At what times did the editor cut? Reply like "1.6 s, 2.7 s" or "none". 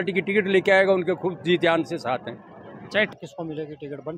3.1 s